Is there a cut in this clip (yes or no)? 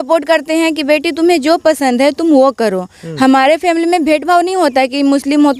no